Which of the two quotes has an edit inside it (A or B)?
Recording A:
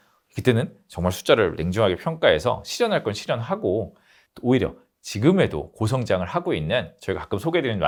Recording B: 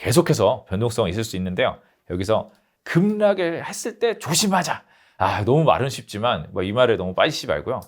B